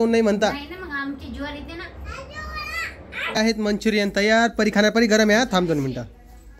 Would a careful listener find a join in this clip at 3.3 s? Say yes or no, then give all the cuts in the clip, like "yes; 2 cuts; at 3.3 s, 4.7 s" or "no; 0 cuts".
yes; 1 cut; at 3.3 s